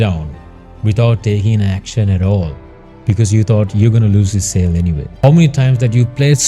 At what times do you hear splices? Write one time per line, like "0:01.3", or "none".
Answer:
0:05.1